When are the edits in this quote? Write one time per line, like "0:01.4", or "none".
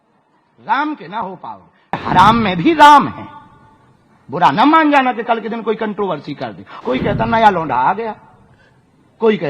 0:02.0
0:06.6